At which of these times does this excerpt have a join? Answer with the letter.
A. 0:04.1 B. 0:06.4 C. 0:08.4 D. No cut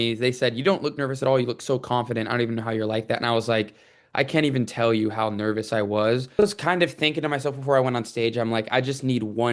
B